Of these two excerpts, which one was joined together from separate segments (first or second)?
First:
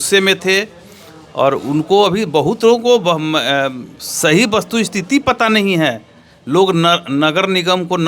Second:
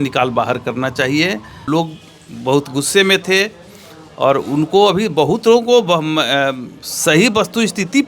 second